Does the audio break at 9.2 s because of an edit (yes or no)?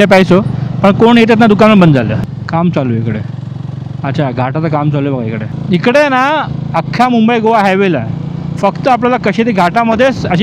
no